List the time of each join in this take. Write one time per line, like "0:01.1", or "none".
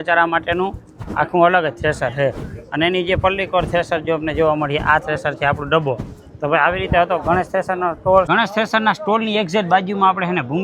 none